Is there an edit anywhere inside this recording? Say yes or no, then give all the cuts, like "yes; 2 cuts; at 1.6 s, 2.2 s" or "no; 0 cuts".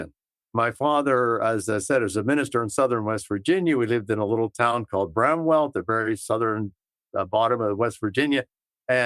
no; 0 cuts